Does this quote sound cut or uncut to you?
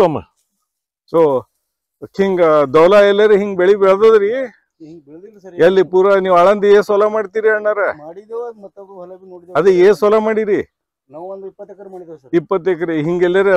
uncut